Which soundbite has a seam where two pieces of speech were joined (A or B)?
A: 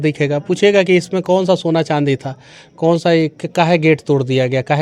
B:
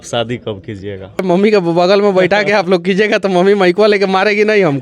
B